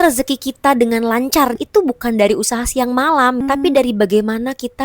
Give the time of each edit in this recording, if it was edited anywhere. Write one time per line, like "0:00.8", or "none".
0:01.6
0:03.4